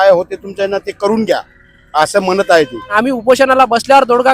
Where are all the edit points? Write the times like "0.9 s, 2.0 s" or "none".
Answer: 2.9 s